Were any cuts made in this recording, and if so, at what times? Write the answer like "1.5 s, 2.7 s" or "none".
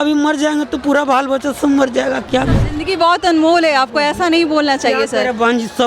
2.6 s